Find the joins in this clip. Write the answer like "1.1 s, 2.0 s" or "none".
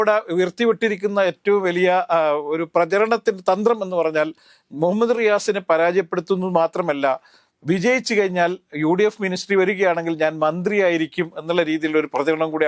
none